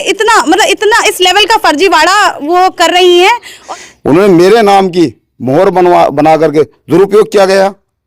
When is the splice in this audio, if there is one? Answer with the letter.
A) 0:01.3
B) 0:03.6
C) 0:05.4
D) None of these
B